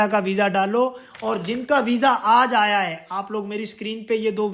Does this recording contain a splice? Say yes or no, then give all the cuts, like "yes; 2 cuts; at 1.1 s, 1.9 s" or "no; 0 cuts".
no; 0 cuts